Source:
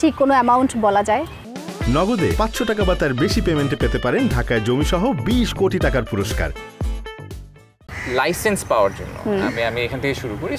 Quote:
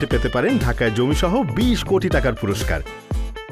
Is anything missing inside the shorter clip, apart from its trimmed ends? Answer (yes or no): no